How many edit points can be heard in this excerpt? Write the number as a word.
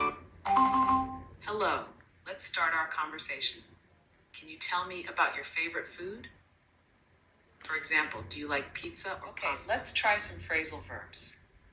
one